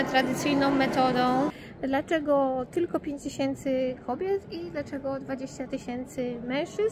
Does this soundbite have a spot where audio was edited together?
yes; 1 cut; at 1.6 s

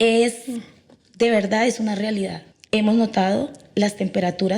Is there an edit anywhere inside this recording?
yes; 1 cut; at 2.4 s

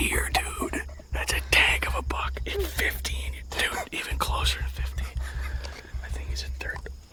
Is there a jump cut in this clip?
no; 0 cuts

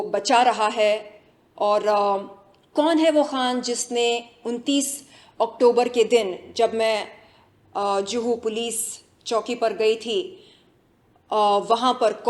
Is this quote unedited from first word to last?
yes; 0 cuts

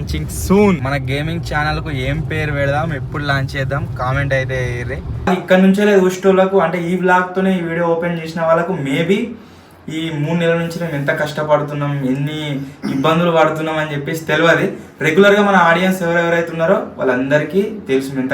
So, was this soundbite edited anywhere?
yes; 1 cut; at 5.3 s

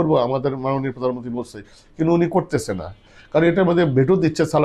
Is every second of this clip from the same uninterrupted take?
yes; 0 cuts

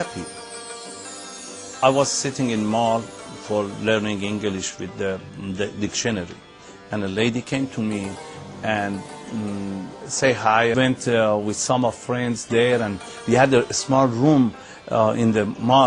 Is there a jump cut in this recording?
no; 0 cuts

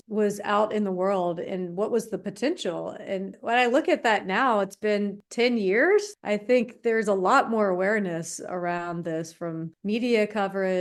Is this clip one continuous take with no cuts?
yes; 0 cuts

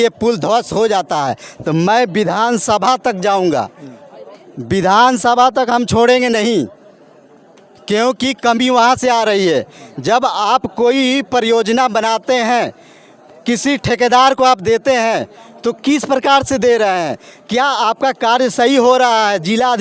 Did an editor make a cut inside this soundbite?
no; 0 cuts

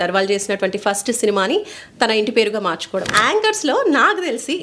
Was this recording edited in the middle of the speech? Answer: yes; 1 cut; at 3.1 s

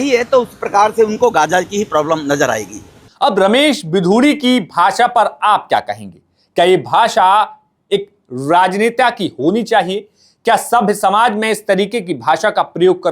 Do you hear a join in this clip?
no; 0 cuts

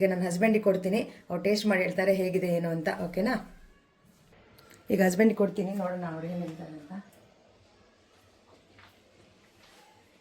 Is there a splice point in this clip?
no; 0 cuts

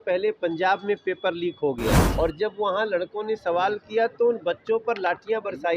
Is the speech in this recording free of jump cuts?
no; 1 cut; at 2.0 s

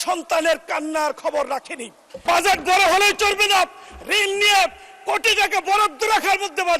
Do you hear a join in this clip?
yes; 1 cut; at 2.1 s

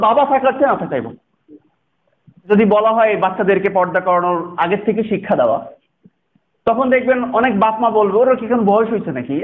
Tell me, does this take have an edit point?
yes; 1 cut; at 2.4 s

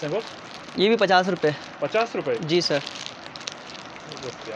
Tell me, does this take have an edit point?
no; 0 cuts

